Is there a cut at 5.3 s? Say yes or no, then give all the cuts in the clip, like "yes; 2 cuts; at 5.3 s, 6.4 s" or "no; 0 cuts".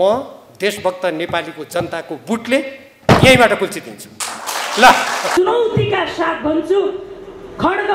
yes; 1 cut; at 5.3 s